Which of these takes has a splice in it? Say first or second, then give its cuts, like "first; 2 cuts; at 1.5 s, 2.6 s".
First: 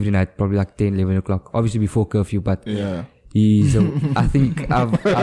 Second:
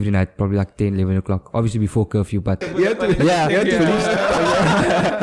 second; 1 cut; at 2.6 s